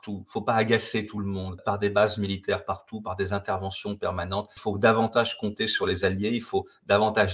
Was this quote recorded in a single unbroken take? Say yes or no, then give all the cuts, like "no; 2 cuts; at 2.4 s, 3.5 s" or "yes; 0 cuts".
no; 1 cut; at 1.6 s